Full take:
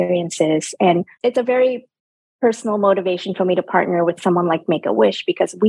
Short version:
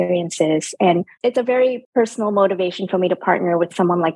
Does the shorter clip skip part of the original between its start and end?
yes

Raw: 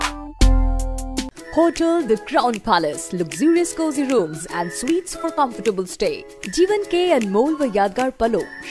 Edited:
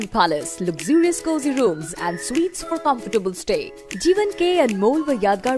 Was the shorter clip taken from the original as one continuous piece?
yes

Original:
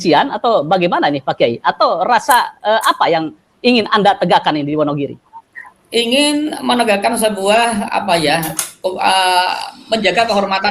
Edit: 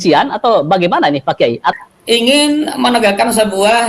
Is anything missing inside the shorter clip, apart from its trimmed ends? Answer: yes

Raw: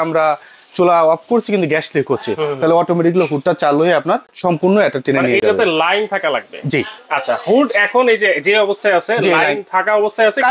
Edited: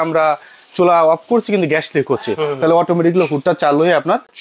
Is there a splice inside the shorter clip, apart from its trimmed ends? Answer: no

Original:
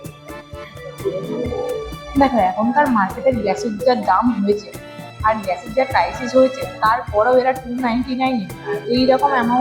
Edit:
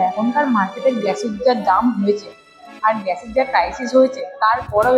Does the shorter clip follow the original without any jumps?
yes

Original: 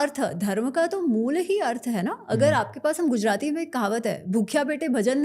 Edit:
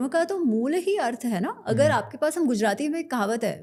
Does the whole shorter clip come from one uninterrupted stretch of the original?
yes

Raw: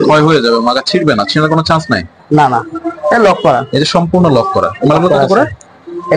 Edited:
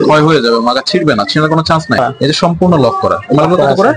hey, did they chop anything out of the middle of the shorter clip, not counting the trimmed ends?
yes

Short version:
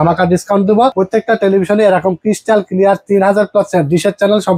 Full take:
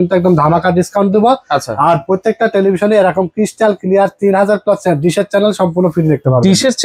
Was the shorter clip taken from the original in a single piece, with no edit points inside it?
no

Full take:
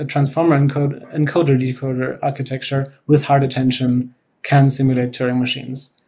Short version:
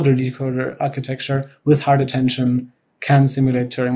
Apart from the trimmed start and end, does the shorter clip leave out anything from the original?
no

